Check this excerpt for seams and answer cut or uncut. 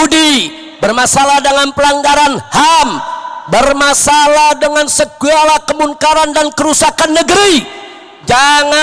uncut